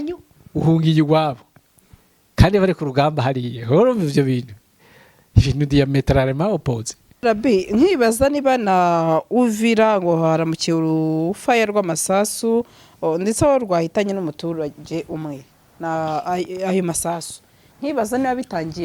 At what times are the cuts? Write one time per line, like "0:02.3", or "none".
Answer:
0:07.2